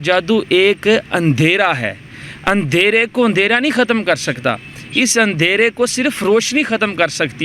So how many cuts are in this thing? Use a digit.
0